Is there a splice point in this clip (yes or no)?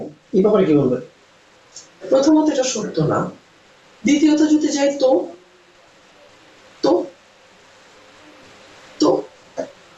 no